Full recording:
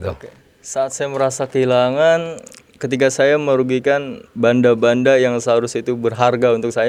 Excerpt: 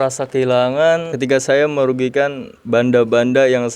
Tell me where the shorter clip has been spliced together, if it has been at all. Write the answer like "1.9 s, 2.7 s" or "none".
1.1 s